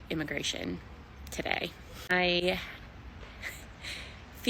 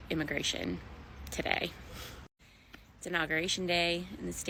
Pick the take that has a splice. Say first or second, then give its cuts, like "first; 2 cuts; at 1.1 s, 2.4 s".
first; 1 cut; at 2.1 s